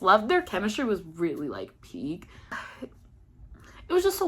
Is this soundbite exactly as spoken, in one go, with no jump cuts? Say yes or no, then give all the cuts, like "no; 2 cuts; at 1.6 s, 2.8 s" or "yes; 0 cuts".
no; 1 cut; at 2.5 s